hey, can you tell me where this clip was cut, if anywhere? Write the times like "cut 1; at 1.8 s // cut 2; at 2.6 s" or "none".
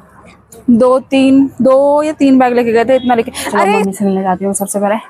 cut 1; at 3.7 s